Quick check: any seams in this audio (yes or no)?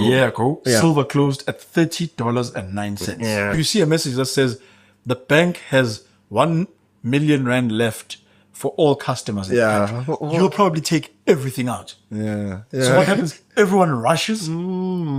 yes